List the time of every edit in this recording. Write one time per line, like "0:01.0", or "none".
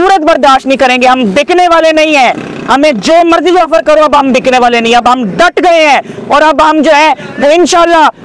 none